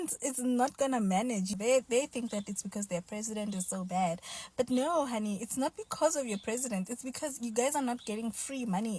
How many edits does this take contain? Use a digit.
1